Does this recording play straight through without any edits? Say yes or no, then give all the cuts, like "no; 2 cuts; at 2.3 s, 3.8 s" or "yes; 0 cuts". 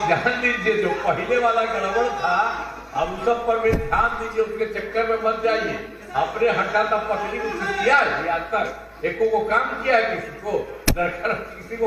yes; 0 cuts